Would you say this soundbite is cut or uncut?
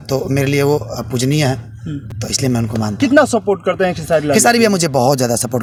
uncut